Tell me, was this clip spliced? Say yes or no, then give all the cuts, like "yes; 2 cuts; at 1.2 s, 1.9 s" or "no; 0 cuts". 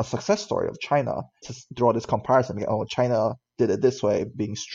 yes; 1 cut; at 1.4 s